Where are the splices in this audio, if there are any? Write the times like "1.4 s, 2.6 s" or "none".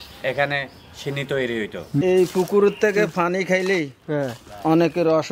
2.0 s

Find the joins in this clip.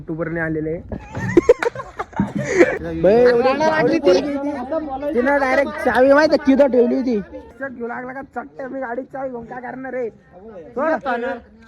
2.8 s, 7.5 s

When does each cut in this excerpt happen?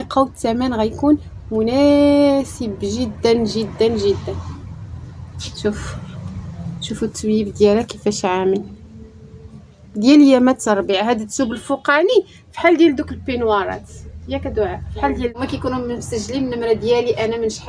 15.4 s

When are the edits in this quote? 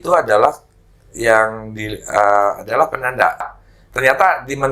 3.5 s

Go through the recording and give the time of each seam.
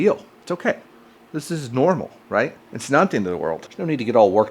3.6 s

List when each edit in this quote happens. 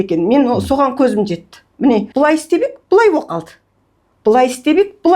2.1 s

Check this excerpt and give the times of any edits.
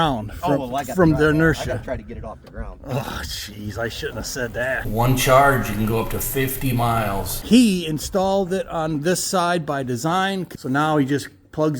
4.8 s, 7.4 s, 10.5 s

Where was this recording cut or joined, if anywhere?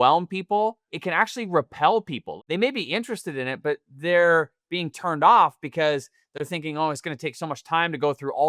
1.0 s, 2.3 s

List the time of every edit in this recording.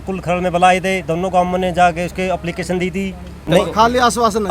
3.3 s

